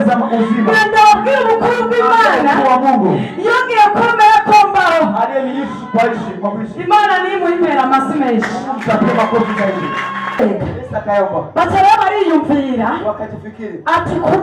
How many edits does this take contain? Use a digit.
1